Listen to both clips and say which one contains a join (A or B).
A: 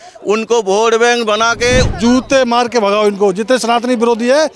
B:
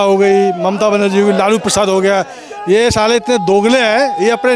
A